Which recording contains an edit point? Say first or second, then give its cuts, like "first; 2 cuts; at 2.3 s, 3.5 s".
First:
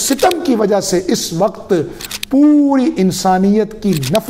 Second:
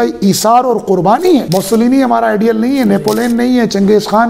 second; 1 cut; at 1.5 s